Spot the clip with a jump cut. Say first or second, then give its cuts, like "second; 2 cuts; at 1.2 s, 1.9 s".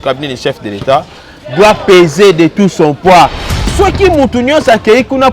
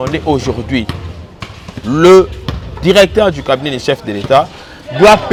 first; 1 cut; at 3.7 s